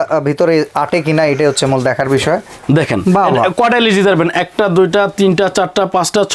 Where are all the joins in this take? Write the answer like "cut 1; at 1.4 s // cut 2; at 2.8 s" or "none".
none

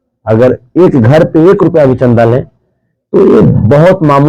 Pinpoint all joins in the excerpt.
none

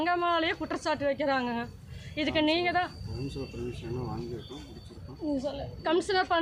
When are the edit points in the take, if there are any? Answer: none

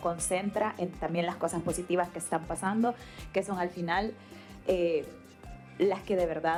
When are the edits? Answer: none

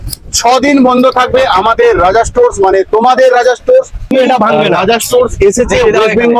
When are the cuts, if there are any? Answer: cut 1; at 4.1 s

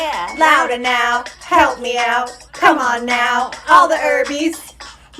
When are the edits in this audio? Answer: none

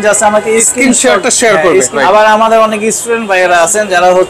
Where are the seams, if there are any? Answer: cut 1; at 1.9 s

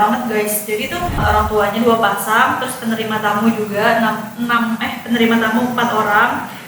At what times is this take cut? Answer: cut 1; at 1.2 s

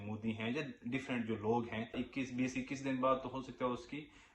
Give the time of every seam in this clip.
cut 1; at 2.0 s

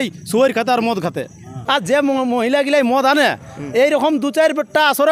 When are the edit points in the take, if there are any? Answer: cut 1; at 1.6 s

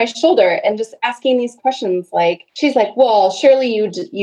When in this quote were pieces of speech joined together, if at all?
cut 1; at 2.5 s

